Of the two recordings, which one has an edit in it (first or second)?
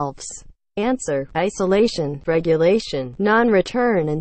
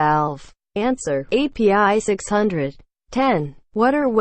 second